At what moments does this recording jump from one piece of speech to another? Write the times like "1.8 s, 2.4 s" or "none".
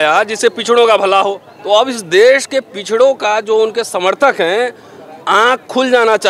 1.5 s